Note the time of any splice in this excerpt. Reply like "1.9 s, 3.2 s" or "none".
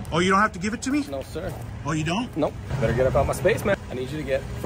2.7 s, 3.8 s